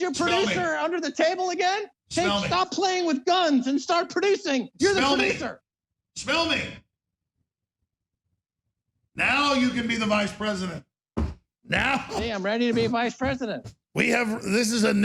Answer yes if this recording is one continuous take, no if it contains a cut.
yes